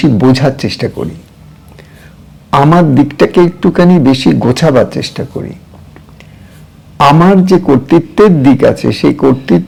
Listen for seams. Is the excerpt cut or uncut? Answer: uncut